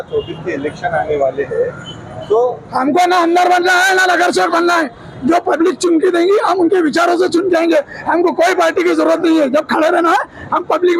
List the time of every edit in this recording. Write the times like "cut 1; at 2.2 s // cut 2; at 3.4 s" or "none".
none